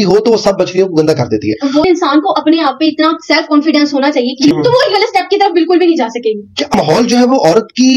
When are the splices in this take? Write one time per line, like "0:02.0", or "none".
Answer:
0:01.8
0:04.5
0:06.7